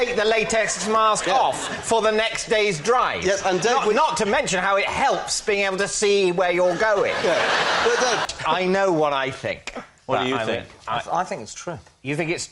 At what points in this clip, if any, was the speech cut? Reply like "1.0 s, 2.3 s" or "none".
8.3 s